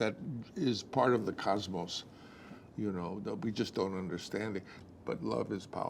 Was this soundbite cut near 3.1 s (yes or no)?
no